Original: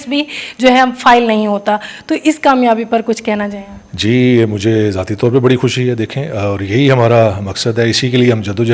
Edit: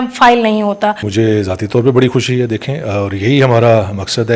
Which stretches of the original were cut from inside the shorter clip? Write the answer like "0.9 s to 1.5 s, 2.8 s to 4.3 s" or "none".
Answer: 1.9 s to 4.5 s